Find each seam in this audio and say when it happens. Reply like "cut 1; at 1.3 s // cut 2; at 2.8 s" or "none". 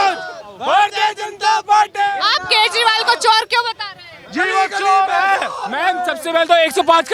none